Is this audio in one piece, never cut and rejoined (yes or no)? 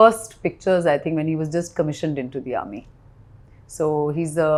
yes